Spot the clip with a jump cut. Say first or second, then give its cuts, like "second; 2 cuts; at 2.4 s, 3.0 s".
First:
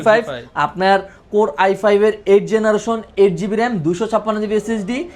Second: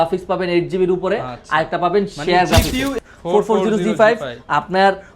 second; 1 cut; at 2.9 s